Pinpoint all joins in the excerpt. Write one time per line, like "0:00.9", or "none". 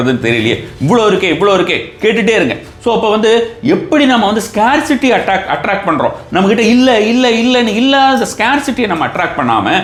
none